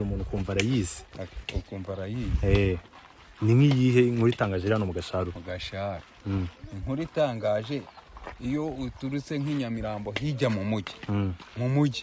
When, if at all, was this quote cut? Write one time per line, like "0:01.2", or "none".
none

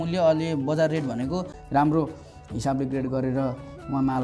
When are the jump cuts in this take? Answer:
0:01.6

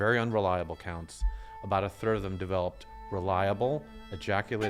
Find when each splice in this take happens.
none

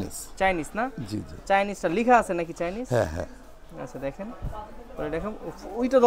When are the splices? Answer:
none

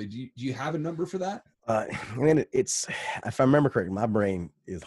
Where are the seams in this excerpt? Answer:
0:01.5

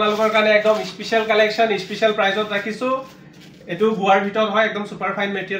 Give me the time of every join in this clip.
none

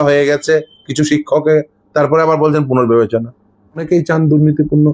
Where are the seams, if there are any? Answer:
0:03.8

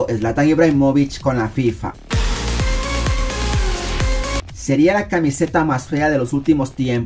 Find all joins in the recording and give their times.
0:02.0
0:04.5

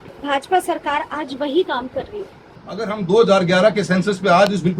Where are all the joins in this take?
0:02.9

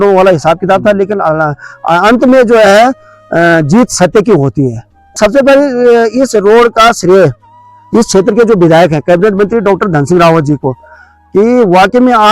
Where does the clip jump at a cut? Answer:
0:05.2

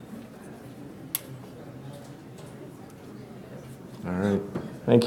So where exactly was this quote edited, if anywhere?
0:01.2

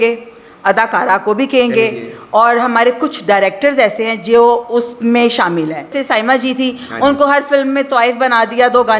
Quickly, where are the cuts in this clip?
0:06.0

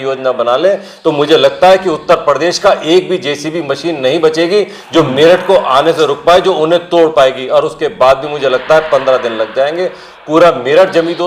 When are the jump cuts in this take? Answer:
none

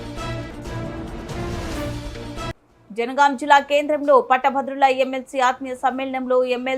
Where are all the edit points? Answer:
0:02.7

